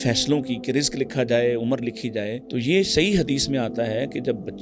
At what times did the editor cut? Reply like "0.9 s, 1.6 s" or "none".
2.5 s